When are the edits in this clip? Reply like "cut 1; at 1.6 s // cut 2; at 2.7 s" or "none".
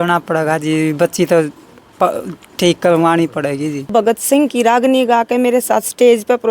cut 1; at 3.9 s

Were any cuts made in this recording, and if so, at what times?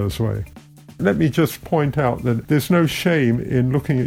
cut 1; at 1.0 s // cut 2; at 2.4 s

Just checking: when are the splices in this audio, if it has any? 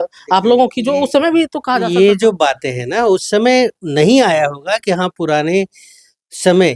none

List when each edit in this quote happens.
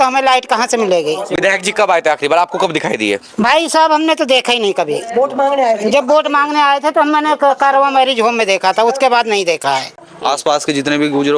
cut 1; at 10.1 s

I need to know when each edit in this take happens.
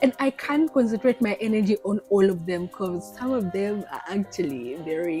none

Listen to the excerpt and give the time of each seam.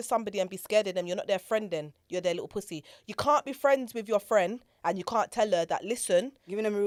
none

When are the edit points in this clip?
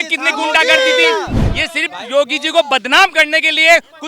cut 1; at 1.4 s

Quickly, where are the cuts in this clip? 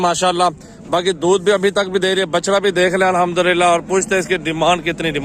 none

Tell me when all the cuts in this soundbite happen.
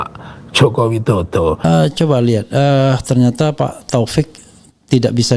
cut 1; at 1.6 s

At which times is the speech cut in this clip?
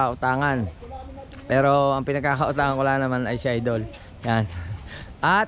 none

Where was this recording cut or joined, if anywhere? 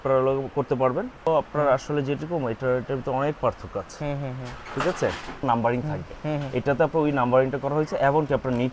cut 1; at 1.3 s // cut 2; at 5.4 s

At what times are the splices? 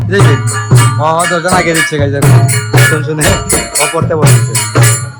none

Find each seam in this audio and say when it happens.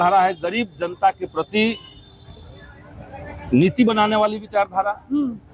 none

